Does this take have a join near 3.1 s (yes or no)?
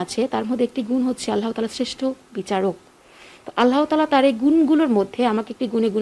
no